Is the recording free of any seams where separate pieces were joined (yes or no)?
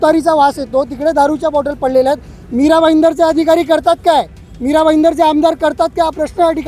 yes